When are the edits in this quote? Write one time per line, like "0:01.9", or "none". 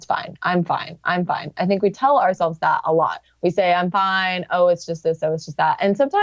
0:03.2

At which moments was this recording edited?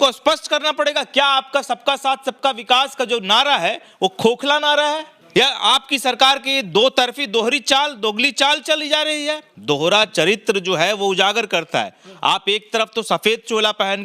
0:05.1
0:09.5

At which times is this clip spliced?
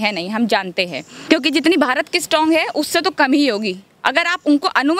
0:01.1

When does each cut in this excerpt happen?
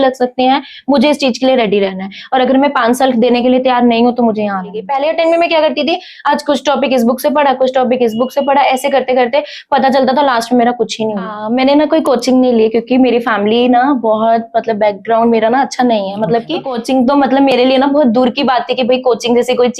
0:04.8
0:11.4
0:16.7

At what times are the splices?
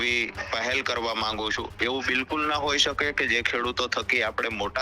0:01.7

